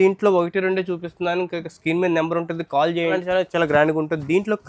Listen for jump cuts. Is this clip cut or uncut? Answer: cut